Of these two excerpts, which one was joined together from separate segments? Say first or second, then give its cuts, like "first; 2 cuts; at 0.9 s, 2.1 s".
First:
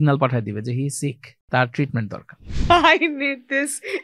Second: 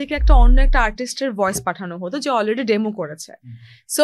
first; 2 cuts; at 1.3 s, 2.5 s